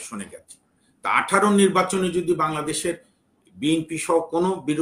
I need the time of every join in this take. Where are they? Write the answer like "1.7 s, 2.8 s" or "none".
none